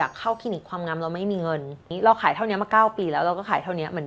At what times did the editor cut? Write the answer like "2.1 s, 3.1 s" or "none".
1.8 s